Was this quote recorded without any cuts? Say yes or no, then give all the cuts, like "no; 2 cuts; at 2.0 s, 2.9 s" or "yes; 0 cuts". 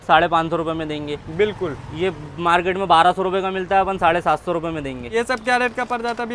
yes; 0 cuts